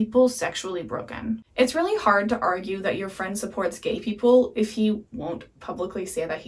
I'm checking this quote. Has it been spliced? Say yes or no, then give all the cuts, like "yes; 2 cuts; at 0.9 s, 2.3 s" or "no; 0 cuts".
yes; 1 cut; at 1.5 s